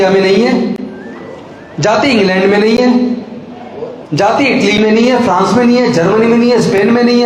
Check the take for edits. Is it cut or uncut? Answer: uncut